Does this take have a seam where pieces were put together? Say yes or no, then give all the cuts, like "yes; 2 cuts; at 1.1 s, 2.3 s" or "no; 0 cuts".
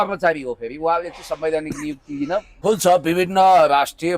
yes; 1 cut; at 2.5 s